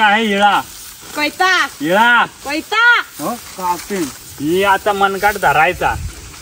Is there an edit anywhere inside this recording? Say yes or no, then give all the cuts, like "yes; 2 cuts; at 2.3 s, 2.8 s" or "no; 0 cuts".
yes; 1 cut; at 4.2 s